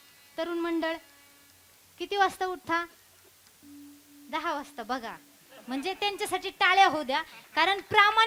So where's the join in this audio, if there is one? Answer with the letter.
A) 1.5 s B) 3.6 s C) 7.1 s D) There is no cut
B